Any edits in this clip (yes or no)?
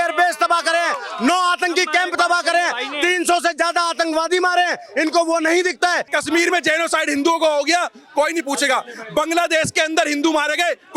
yes